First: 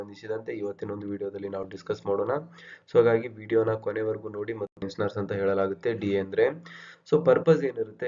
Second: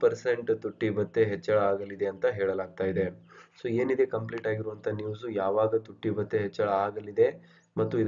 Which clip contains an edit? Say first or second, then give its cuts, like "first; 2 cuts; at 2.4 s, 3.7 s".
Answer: first; 1 cut; at 4.9 s